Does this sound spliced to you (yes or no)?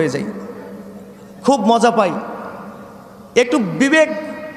no